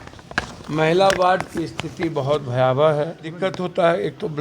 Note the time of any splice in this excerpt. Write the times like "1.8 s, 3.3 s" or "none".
3.4 s